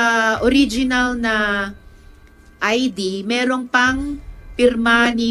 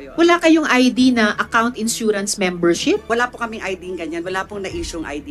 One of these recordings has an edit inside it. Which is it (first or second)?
second